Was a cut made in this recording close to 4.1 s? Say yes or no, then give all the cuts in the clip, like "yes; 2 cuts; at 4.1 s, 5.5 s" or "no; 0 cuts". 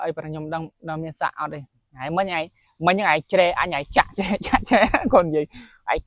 no; 1 cut; at 1.9 s